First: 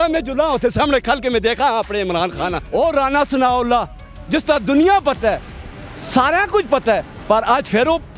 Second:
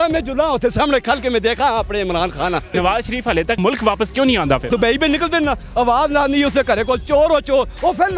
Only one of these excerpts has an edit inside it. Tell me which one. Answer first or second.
second